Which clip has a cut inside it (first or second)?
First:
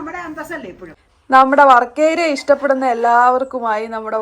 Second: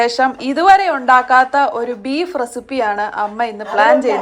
first